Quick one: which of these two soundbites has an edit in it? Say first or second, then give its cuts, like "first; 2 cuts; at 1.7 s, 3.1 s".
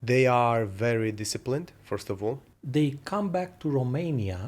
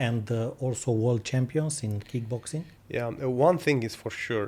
first; 1 cut; at 2.5 s